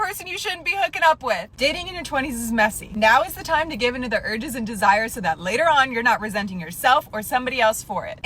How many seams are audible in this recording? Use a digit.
1